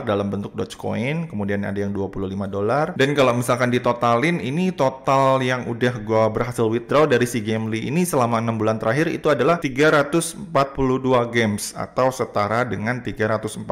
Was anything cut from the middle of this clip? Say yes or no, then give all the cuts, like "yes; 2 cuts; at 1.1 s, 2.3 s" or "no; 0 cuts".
no; 0 cuts